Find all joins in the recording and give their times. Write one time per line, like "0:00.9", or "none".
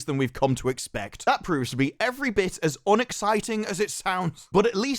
0:01.2